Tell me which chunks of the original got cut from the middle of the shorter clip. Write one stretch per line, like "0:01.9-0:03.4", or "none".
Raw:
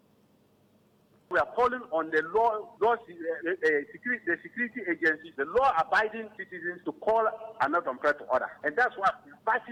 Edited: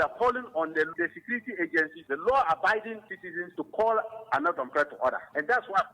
0:02.3-0:04.2